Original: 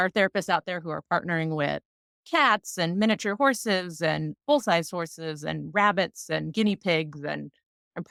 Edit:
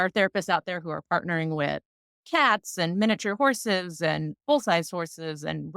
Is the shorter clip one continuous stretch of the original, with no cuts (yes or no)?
yes